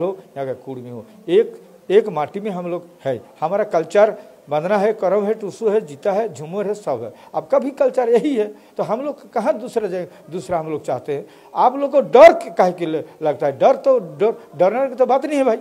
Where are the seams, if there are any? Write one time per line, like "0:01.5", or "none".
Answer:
none